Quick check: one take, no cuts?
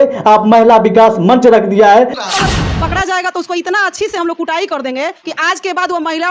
no; 1 cut; at 2.2 s

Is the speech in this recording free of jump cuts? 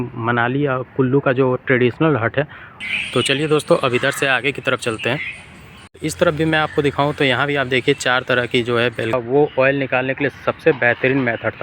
no; 3 cuts; at 2.8 s, 5.7 s, 9.1 s

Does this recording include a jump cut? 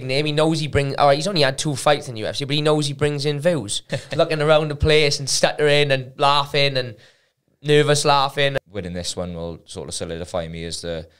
yes; 2 cuts; at 3.9 s, 8.5 s

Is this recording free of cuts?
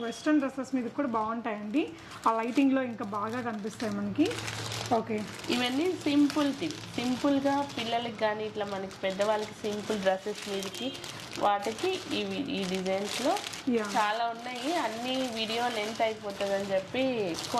yes; 0 cuts

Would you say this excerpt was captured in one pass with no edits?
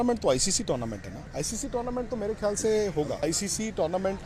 yes; 0 cuts

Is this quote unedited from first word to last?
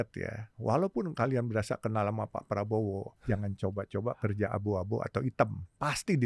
no; 1 cut; at 3.1 s

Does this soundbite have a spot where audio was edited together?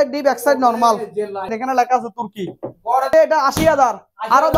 yes; 2 cuts; at 1.6 s, 3.1 s

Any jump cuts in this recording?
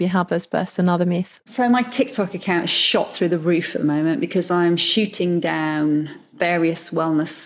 yes; 2 cuts; at 1.3 s, 6.3 s

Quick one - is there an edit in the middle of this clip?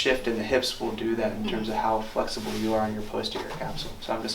no; 0 cuts

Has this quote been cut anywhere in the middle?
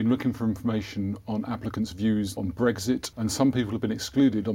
yes; 2 cuts; at 2.4 s, 3.1 s

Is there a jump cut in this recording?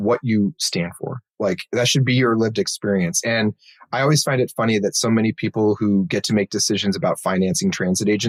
no; 0 cuts

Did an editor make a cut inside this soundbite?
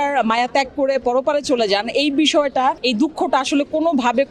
yes; 1 cut; at 2.8 s

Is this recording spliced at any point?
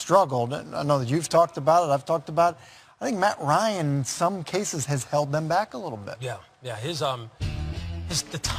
no; 0 cuts

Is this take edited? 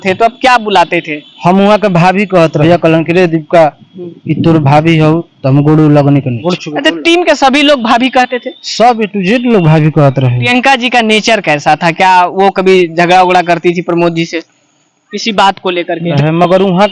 yes; 4 cuts; at 2.6 s, 6.3 s, 10.4 s, 16.2 s

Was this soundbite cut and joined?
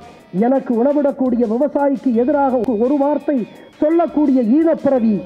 no; 0 cuts

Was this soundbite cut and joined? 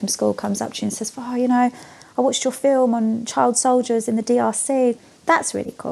yes; 1 cut; at 5.0 s

